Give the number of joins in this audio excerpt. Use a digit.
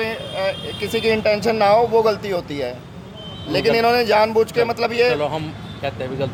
0